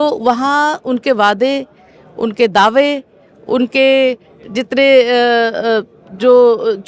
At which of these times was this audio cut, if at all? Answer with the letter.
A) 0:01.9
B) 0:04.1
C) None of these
C